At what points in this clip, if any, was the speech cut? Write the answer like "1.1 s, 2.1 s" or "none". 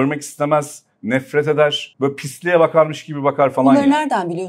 1.8 s